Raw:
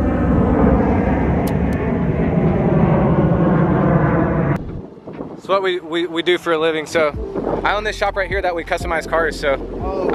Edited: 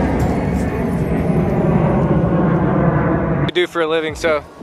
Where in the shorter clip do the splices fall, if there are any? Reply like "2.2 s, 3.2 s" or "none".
3.5 s